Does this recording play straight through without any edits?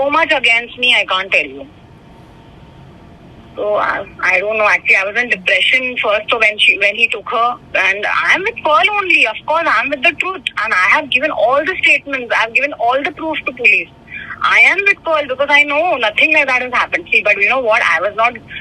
yes; 0 cuts

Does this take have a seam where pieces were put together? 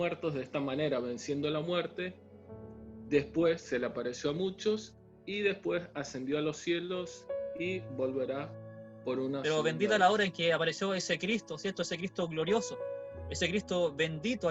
yes; 1 cut; at 9.4 s

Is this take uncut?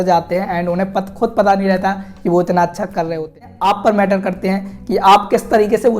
no; 1 cut; at 3.5 s

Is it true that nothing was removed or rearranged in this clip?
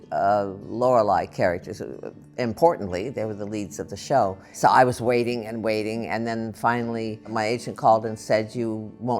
no; 2 cuts; at 4.5 s, 7.3 s

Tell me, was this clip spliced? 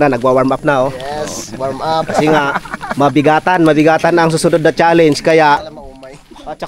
yes; 1 cut; at 5.8 s

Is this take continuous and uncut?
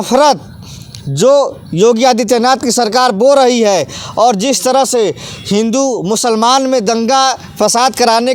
yes; 0 cuts

